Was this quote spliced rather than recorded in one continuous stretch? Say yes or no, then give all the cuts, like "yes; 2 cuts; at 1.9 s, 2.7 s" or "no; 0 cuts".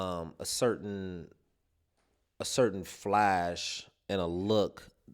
no; 0 cuts